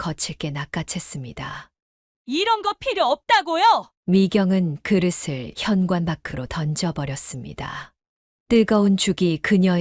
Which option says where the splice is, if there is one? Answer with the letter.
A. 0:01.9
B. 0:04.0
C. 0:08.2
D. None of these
D